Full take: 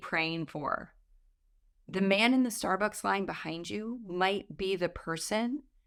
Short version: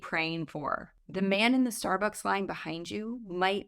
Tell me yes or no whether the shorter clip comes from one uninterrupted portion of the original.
no